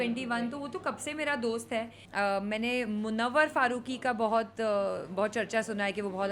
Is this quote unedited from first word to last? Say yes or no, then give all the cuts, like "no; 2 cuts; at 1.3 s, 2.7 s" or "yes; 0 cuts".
no; 1 cut; at 2.0 s